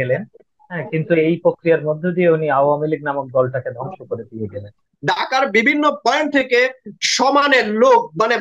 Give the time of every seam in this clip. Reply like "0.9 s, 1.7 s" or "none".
4.9 s